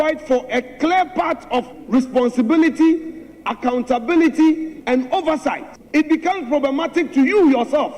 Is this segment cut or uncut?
cut